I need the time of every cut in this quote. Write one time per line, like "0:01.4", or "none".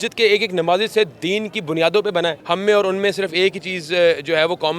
0:02.4